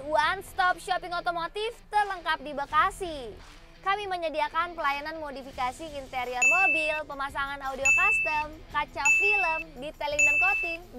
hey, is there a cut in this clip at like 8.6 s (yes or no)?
no